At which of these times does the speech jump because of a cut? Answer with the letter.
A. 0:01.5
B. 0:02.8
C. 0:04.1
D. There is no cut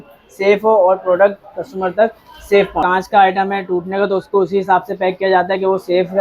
B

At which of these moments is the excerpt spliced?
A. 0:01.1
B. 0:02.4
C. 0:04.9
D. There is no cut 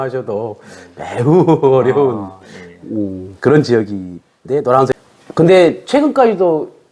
C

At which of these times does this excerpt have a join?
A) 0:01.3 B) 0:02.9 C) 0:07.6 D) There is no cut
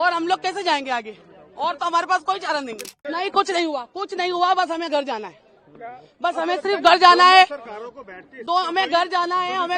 B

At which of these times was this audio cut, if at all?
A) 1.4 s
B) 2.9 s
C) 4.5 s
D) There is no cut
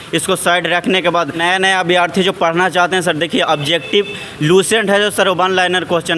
A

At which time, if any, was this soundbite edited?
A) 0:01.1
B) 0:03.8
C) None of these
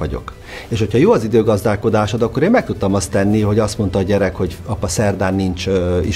C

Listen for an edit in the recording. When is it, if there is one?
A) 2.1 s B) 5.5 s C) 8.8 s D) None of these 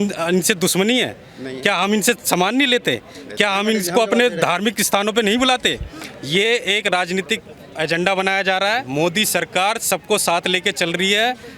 D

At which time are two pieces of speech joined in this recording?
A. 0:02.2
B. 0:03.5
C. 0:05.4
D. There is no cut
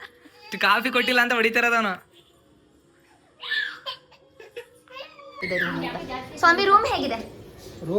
C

